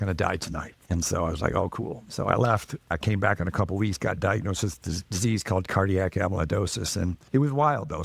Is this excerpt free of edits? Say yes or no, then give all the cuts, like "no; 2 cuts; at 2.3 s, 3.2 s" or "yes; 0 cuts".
yes; 0 cuts